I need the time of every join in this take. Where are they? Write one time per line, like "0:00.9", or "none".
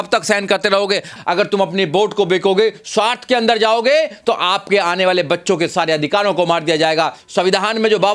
0:01.2